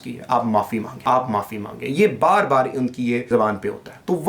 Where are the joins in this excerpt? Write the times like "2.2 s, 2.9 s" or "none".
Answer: 0.9 s, 3.5 s